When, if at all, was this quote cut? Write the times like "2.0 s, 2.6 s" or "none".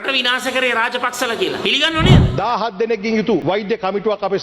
2.3 s, 3.4 s